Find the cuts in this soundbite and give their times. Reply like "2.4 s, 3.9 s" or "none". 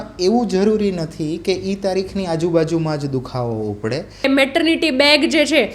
4.3 s